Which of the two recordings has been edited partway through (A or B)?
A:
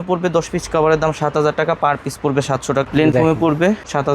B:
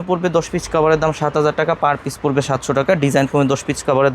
A